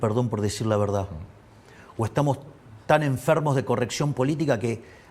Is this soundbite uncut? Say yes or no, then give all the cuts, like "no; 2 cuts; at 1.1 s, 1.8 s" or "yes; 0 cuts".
yes; 0 cuts